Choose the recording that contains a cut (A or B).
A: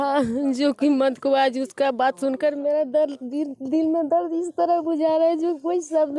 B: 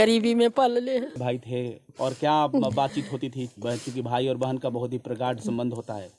B